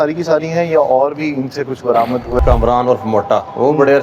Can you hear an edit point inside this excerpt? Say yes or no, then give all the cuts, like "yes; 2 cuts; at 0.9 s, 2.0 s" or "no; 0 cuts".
yes; 1 cut; at 2.4 s